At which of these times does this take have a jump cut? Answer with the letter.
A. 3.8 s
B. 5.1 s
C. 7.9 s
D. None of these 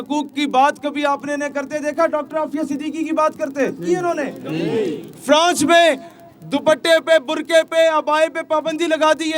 A